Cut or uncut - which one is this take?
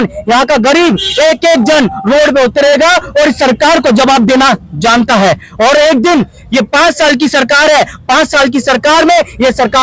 uncut